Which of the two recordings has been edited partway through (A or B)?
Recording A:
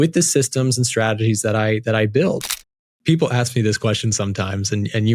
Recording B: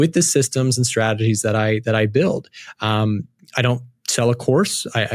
A